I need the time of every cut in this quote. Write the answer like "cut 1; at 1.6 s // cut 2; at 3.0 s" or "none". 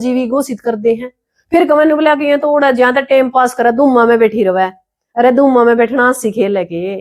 none